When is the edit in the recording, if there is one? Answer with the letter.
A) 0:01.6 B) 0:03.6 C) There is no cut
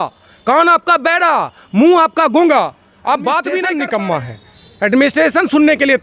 B